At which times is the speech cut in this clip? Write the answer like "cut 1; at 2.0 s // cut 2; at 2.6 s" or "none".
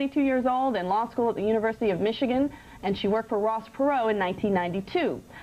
cut 1; at 1.5 s